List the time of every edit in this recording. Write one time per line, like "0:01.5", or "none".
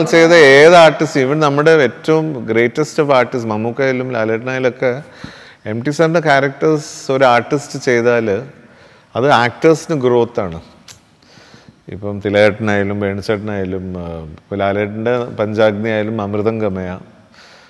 none